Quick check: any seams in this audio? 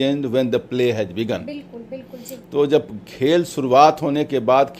no; 0 cuts

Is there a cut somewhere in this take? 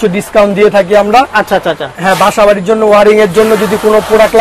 no; 0 cuts

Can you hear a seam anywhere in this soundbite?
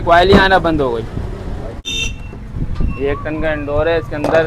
yes; 1 cut; at 1.8 s

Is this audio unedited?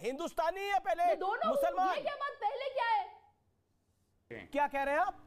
no; 1 cut; at 4.4 s

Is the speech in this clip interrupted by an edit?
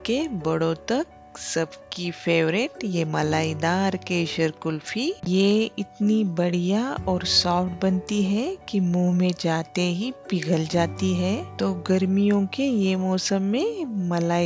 no; 0 cuts

